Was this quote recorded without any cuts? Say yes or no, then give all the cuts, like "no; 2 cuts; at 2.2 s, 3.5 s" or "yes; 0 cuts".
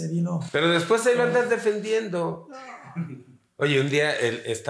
yes; 0 cuts